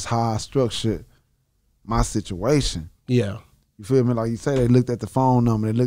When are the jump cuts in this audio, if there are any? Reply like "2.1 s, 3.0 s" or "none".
none